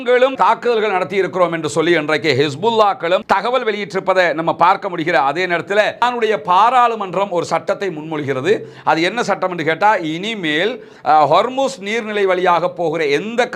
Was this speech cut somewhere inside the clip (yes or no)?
yes